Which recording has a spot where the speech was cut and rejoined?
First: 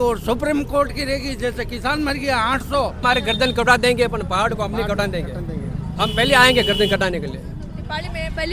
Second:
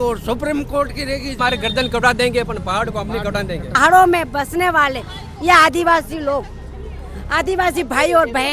second; 2 cuts; at 1.3 s, 3.8 s

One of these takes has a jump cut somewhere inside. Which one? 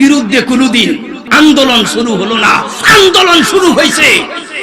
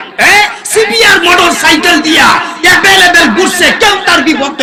first; 1 cut; at 1.3 s

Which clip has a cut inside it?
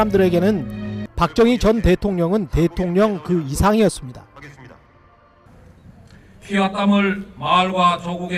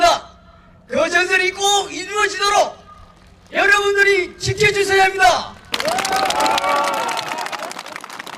second; 1 cut; at 5.6 s

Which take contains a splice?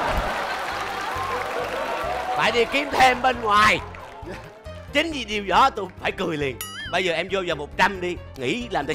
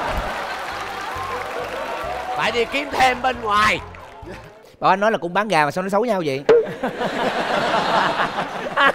second; 1 cut; at 4.6 s

